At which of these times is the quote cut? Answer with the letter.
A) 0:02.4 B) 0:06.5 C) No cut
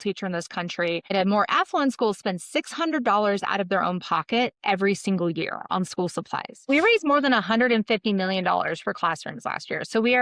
B